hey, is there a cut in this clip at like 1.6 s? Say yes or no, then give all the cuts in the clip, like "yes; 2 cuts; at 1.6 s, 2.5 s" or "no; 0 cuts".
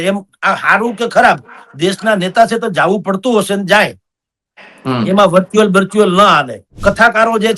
no; 1 cut; at 6.6 s